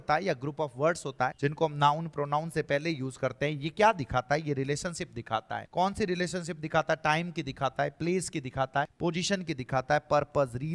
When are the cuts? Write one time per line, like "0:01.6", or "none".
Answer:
0:01.3
0:05.6
0:08.9